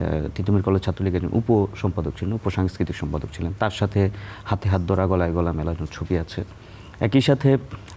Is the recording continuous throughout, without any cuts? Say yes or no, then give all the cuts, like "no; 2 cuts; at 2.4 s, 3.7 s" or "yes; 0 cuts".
yes; 0 cuts